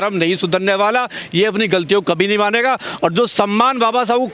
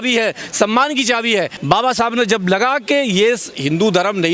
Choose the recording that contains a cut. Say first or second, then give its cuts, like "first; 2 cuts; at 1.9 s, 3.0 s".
second; 1 cut; at 1.6 s